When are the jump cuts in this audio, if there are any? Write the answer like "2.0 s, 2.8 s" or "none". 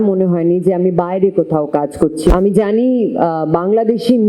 2.3 s